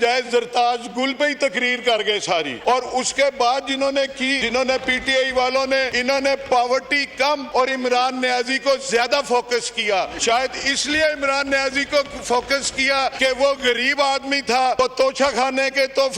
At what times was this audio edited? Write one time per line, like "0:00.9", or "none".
0:02.5
0:04.4
0:05.9
0:07.4
0:10.1
0:13.2
0:14.8